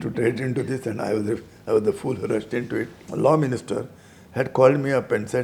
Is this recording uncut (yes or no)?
no